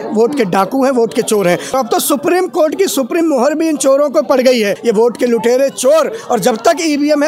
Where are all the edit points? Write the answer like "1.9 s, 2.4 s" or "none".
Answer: 1.7 s, 4.8 s